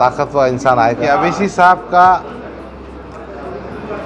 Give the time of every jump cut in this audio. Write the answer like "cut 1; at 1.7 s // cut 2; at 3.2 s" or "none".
cut 1; at 1.0 s

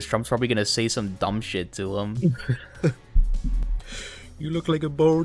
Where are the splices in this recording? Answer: none

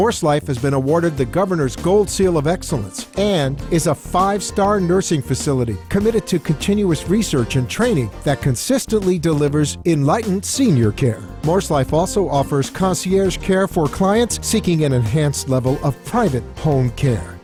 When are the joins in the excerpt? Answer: none

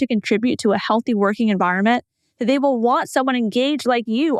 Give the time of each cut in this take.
none

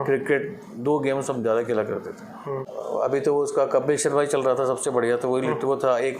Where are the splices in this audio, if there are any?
cut 1; at 2.7 s

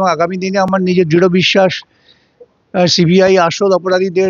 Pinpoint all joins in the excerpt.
none

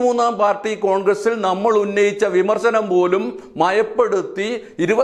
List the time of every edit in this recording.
none

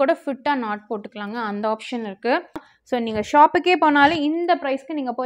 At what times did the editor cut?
cut 1; at 2.7 s

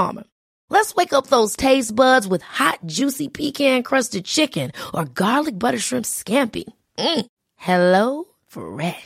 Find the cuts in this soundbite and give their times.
none

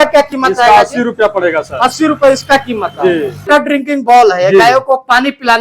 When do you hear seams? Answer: cut 1; at 3.5 s

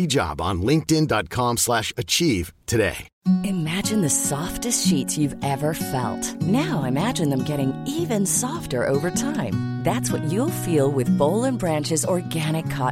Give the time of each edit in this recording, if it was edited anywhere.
cut 1; at 3.1 s

